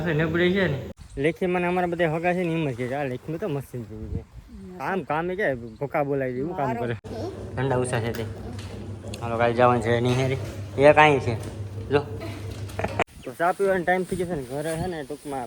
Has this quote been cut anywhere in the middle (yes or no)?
yes